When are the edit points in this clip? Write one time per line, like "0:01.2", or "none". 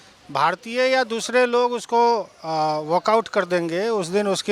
none